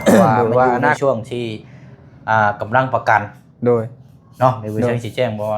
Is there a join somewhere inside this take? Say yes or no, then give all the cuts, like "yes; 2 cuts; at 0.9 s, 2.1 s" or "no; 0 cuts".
yes; 1 cut; at 1.0 s